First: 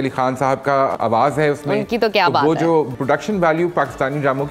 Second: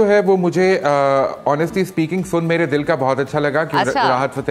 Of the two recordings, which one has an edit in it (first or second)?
first